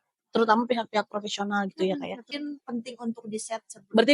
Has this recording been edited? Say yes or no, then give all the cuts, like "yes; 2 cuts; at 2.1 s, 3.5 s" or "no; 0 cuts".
yes; 1 cut; at 2.3 s